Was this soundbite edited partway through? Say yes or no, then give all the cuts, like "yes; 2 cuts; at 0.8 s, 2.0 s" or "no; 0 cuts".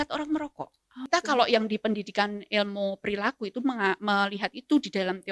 yes; 1 cut; at 0.9 s